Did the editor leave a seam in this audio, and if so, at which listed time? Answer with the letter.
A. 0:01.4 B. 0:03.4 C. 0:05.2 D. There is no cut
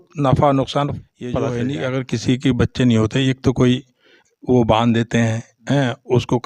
A